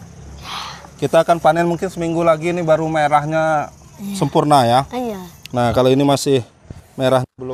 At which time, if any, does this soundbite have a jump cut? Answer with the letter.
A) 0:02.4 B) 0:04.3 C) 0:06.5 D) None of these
D